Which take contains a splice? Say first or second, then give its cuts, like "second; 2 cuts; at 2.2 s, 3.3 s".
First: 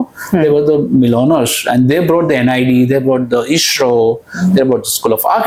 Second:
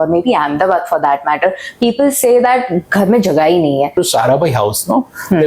second; 1 cut; at 3.9 s